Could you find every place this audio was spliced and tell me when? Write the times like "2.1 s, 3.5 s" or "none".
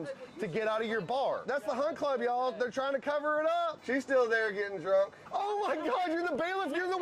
1.4 s, 3.8 s, 5.2 s